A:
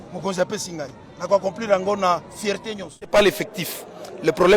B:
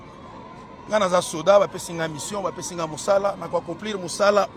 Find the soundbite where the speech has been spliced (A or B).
A